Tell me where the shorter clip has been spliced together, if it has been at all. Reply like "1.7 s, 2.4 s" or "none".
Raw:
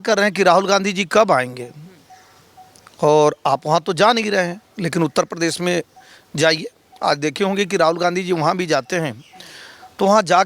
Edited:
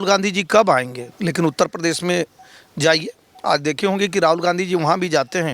1.1 s